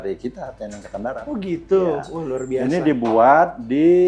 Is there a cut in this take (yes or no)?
no